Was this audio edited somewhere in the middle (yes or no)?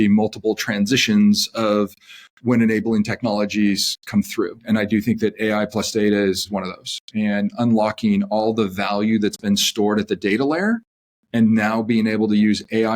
yes